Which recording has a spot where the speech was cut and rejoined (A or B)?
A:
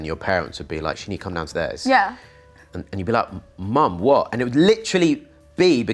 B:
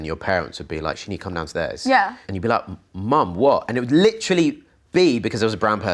B